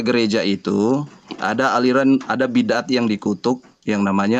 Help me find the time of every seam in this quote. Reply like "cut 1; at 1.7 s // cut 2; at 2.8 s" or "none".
none